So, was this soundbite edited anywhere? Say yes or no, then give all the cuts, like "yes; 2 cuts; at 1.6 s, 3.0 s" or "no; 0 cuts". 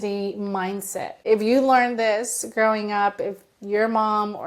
yes; 1 cut; at 1.1 s